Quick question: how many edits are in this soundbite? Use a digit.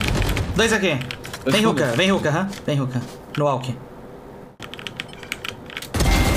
1